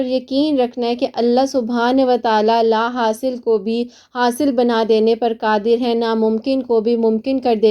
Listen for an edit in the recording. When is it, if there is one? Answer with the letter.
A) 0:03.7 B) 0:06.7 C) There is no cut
C